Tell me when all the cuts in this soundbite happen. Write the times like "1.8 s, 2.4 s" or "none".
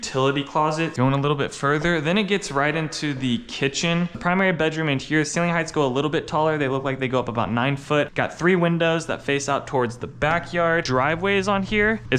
0.9 s, 4.2 s, 8.1 s, 10.9 s